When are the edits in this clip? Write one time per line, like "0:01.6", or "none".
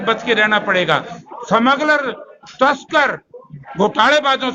none